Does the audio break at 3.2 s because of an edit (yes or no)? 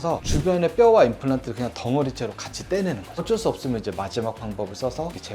yes